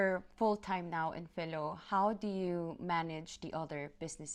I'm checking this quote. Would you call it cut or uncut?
uncut